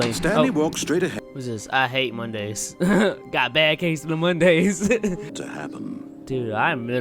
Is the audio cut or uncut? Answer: cut